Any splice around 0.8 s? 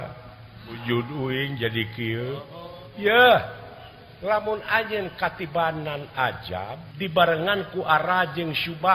yes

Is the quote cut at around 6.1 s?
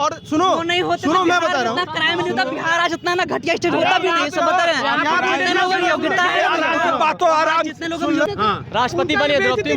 no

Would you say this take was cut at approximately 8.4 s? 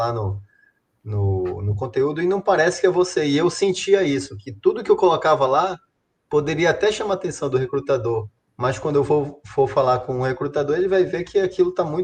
yes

